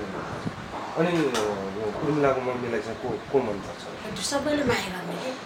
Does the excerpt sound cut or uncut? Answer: cut